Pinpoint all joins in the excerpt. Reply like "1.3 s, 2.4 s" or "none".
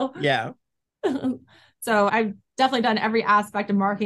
2.1 s